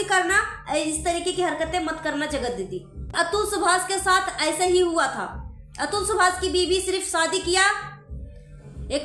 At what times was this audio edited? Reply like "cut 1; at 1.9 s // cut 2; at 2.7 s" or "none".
cut 1; at 3.1 s